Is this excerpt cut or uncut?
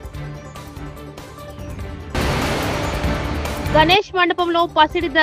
cut